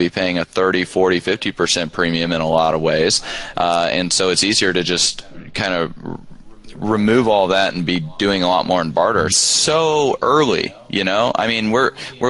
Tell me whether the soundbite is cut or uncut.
cut